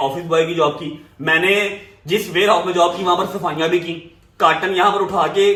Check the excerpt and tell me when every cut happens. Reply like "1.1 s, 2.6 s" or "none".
none